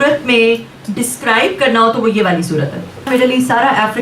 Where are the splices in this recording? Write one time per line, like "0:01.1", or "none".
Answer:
0:03.1